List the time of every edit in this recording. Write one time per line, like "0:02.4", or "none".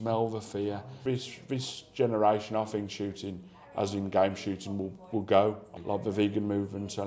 0:00.9
0:05.7